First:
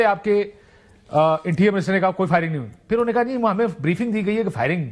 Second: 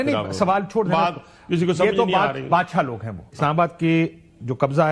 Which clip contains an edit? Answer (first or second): second